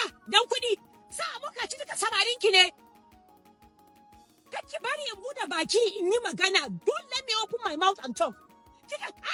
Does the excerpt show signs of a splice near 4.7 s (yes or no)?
no